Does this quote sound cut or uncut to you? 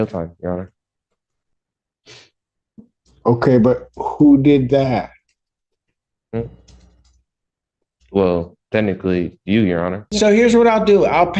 cut